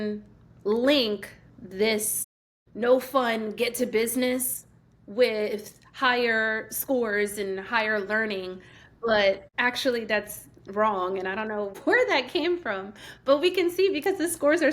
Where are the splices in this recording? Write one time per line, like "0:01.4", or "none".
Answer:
0:09.5
0:11.8